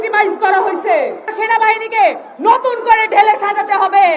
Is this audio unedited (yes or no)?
no